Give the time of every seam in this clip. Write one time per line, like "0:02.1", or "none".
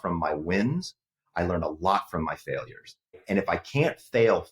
0:03.2